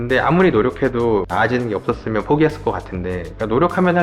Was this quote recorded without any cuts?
no; 1 cut; at 1.3 s

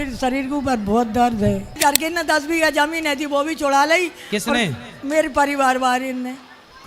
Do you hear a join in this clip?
yes; 1 cut; at 1.7 s

